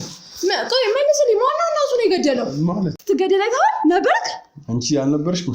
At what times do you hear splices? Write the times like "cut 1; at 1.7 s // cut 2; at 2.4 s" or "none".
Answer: cut 1; at 2.9 s